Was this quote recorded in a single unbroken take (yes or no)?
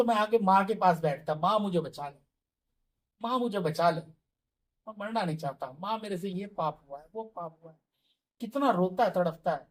yes